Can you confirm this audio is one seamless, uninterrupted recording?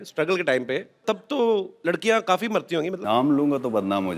no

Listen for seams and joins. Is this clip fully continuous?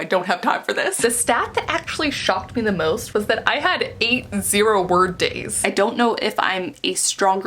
no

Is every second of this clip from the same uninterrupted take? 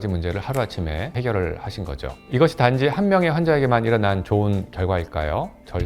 yes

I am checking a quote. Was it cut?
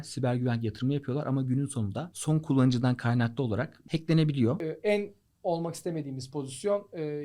yes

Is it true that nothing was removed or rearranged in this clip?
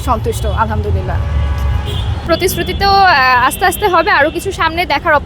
no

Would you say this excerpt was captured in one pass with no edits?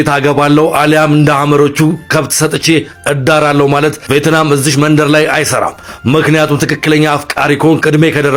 yes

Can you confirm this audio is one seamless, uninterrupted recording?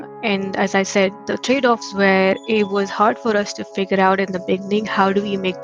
yes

